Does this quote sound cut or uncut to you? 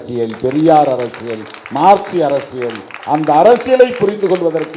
uncut